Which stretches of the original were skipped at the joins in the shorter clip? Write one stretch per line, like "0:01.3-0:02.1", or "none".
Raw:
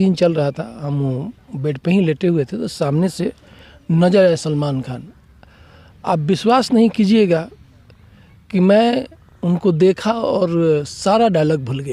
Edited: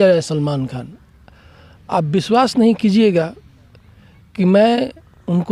none